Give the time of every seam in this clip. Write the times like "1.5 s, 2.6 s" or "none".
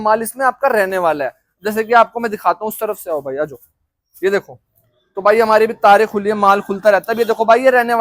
none